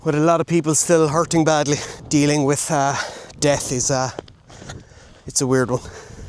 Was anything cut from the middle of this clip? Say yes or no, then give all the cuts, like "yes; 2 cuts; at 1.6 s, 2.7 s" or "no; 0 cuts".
yes; 1 cut; at 1.9 s